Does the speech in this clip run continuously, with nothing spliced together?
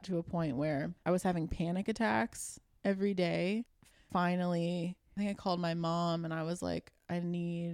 no; 3 cuts; at 1.0 s, 4.1 s, 5.1 s

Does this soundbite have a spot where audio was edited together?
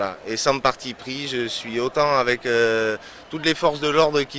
no; 0 cuts

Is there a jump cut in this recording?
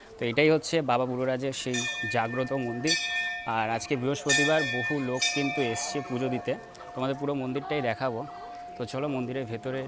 no; 0 cuts

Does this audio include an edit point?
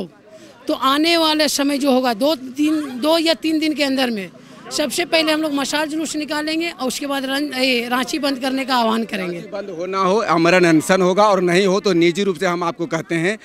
no; 0 cuts

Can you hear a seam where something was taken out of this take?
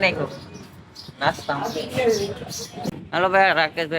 yes; 1 cut; at 2.9 s

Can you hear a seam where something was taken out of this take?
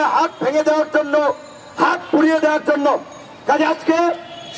no; 0 cuts

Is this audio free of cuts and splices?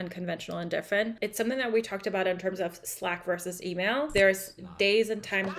no; 2 cuts; at 1.2 s, 4.1 s

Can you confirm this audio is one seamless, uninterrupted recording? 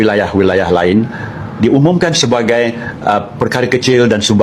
yes; 0 cuts

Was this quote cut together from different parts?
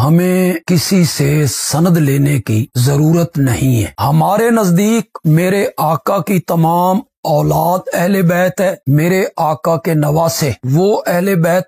yes; 1 cut; at 3.9 s

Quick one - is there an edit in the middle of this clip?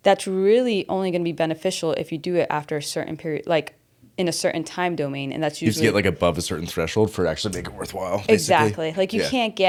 no; 0 cuts

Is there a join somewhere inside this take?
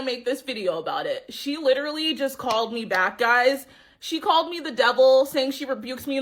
no; 0 cuts

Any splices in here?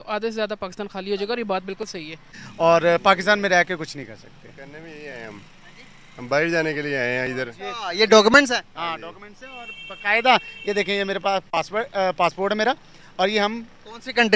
yes; 1 cut; at 2.4 s

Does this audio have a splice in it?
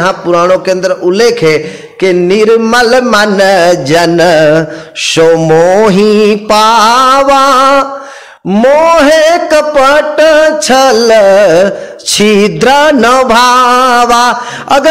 no; 0 cuts

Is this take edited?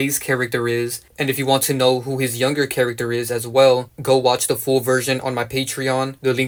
no; 0 cuts

